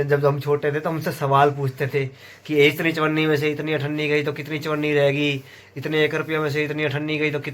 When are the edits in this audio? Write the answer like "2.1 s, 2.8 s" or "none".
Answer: none